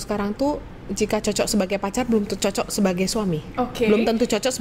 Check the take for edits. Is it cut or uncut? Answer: uncut